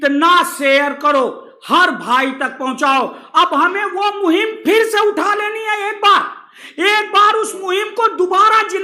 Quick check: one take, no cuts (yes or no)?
yes